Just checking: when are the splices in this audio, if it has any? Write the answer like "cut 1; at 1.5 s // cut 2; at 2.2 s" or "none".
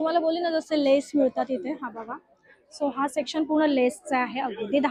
none